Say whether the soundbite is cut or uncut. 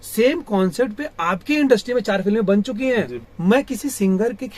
cut